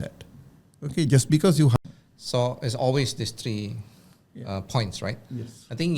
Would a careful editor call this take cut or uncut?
cut